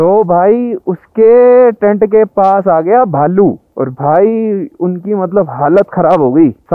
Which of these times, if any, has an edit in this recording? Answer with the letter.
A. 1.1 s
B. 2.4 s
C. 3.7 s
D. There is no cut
C